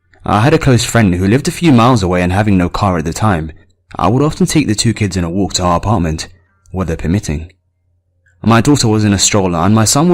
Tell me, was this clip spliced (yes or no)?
yes